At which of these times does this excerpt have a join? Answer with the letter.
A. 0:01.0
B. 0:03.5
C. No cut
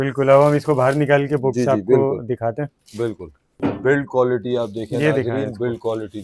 B